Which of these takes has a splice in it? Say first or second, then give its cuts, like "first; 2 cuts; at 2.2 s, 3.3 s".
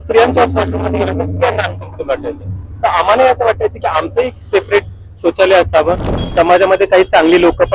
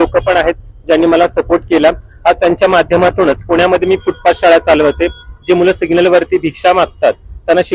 first; 1 cut; at 6.2 s